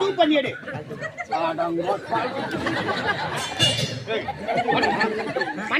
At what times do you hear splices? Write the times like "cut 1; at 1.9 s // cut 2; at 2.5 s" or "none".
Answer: none